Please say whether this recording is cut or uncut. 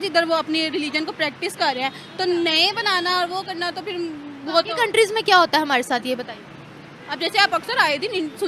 uncut